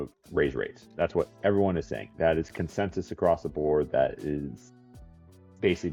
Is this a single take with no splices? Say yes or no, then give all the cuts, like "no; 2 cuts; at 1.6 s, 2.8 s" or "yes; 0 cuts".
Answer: yes; 0 cuts